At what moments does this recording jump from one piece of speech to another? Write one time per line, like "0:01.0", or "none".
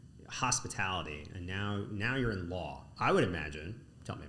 0:02.8